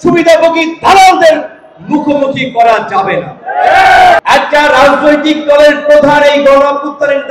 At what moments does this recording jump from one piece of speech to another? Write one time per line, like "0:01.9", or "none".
0:04.2